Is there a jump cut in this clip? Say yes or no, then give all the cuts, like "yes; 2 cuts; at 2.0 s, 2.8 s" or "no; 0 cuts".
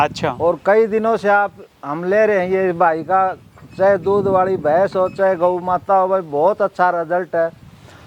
no; 0 cuts